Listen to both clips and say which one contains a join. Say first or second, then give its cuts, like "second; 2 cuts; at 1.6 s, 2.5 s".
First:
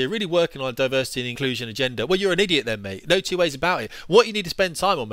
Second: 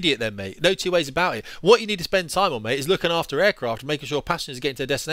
first; 1 cut; at 1.2 s